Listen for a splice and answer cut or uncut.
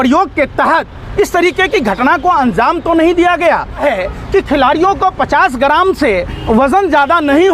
cut